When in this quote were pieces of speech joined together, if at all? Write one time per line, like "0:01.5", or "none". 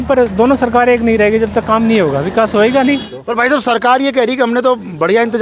0:03.1